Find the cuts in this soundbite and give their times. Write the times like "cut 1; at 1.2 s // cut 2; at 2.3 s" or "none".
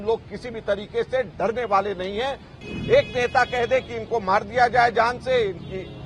cut 1; at 2.5 s